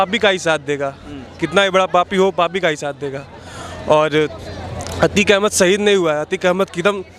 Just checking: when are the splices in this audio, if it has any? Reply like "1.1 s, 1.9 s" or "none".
none